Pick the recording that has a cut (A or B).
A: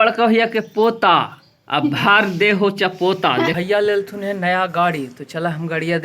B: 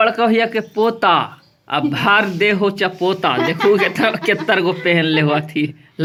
A